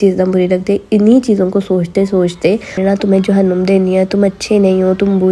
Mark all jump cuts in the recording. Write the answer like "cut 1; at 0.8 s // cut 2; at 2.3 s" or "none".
cut 1; at 2.8 s